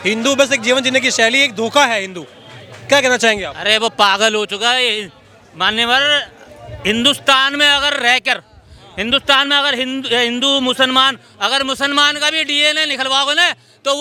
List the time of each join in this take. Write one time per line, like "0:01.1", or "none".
none